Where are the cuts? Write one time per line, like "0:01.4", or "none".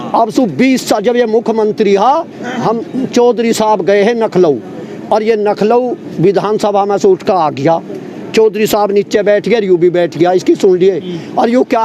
none